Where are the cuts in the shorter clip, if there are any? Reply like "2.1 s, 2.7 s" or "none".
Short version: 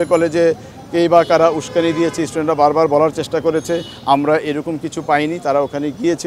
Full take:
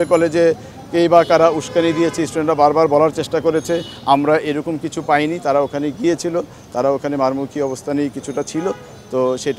none